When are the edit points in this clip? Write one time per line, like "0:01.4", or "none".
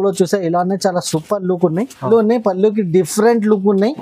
0:02.0